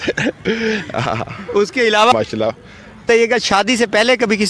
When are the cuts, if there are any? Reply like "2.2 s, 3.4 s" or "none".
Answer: 2.1 s